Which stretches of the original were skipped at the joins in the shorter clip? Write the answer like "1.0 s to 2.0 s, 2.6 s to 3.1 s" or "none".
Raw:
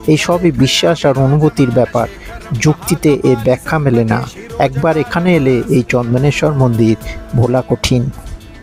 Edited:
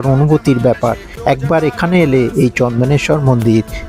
2.2 s to 4.4 s